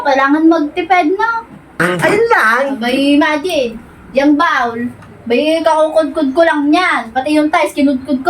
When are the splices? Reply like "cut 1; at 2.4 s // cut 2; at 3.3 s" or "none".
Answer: cut 1; at 1.8 s